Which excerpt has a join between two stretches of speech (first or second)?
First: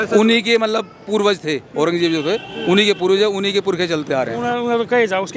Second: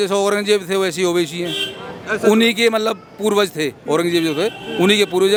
first